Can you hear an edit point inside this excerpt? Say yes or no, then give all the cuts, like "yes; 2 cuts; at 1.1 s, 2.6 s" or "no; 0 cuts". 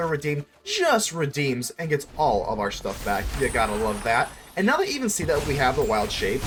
no; 0 cuts